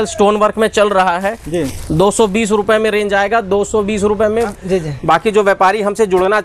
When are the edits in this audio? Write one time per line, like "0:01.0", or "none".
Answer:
0:04.6

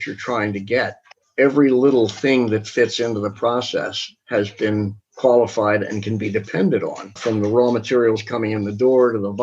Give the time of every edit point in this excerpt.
0:01.2
0:07.1

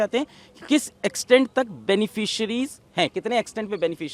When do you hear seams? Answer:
none

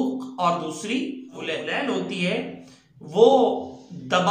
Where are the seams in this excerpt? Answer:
0:01.6

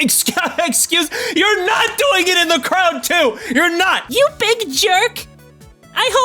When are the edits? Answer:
0:04.0

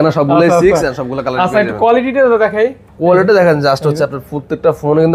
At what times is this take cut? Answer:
none

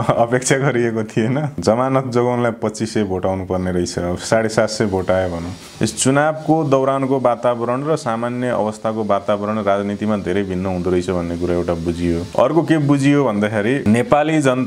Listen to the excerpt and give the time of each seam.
0:01.5
0:05.6
0:12.3
0:13.8

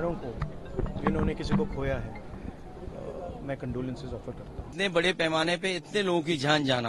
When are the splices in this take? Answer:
0:04.7

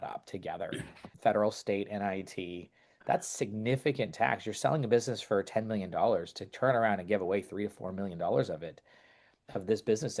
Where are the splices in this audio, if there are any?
0:01.1

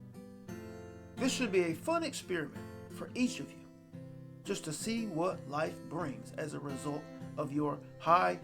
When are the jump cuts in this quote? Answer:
0:01.2

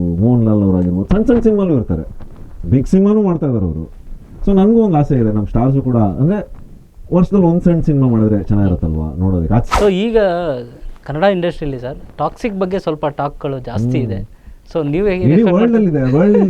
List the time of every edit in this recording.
0:09.7

